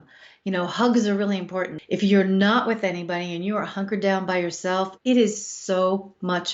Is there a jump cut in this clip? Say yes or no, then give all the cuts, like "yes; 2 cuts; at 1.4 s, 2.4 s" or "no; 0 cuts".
yes; 1 cut; at 1.8 s